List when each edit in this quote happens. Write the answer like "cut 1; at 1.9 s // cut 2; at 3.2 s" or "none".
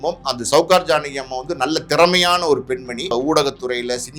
cut 1; at 3.1 s